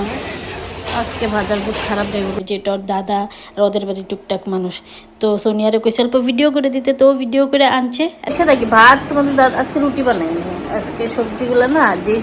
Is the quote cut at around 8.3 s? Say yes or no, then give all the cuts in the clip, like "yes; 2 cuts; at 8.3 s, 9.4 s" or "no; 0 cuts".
yes; 2 cuts; at 2.4 s, 8.3 s